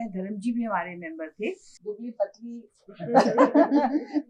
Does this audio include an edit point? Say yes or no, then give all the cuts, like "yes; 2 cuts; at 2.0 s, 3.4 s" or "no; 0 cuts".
yes; 1 cut; at 1.7 s